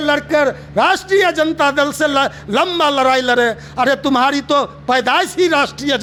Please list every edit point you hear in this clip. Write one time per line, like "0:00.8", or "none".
none

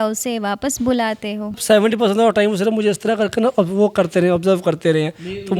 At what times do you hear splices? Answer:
0:01.6

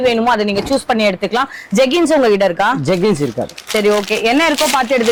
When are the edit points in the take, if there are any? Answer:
none

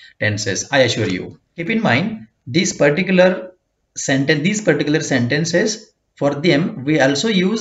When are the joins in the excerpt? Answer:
0:01.7

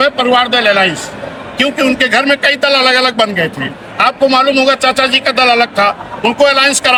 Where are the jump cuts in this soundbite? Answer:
none

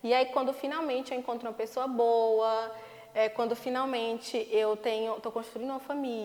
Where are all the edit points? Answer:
none

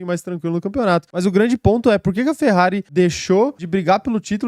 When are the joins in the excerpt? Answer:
0:01.1
0:02.8
0:03.6

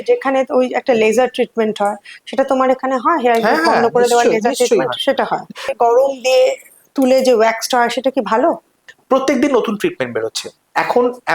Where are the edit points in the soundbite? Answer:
0:05.7
0:09.0

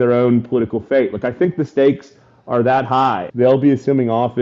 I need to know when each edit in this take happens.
0:03.2

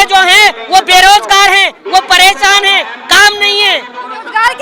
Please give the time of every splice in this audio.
none

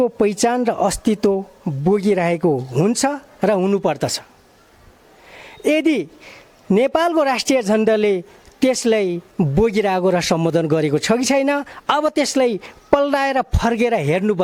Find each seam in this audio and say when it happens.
none

